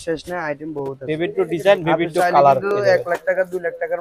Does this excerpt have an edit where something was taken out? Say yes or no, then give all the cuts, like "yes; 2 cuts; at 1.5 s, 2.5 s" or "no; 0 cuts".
no; 0 cuts